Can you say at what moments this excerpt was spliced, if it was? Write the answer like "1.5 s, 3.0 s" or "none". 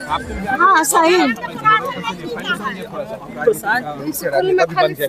none